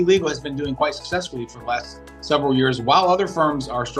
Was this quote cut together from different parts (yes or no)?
no